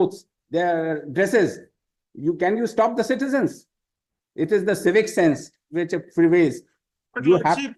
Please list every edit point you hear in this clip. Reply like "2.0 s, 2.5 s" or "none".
none